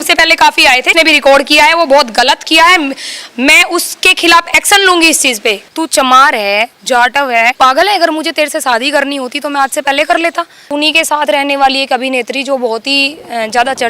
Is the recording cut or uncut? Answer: cut